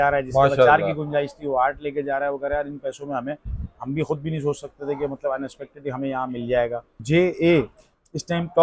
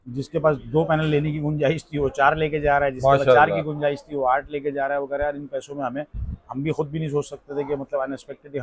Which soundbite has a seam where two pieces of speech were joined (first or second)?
first